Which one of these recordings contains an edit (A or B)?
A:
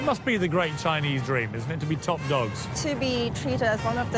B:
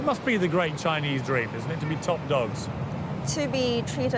A